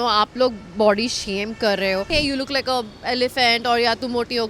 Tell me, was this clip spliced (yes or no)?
yes